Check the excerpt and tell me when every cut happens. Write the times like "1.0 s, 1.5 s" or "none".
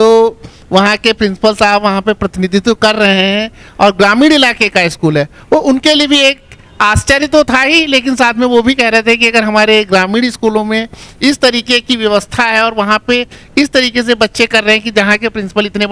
none